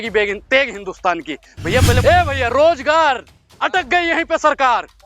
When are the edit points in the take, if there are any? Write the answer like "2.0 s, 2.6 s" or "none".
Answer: 2.0 s